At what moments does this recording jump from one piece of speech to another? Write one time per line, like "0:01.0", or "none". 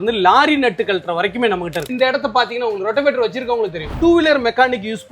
0:01.8
0:03.9